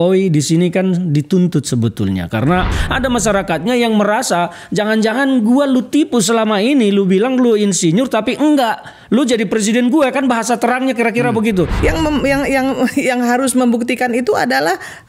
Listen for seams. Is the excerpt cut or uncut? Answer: cut